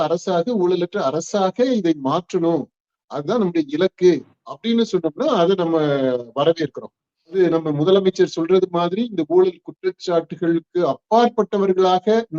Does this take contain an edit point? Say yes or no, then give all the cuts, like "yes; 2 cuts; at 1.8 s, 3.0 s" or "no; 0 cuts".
yes; 1 cut; at 7.3 s